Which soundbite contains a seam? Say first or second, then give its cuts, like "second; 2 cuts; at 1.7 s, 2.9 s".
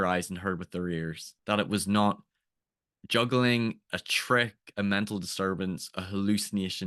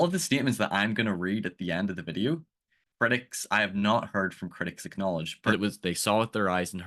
second; 1 cut; at 5.4 s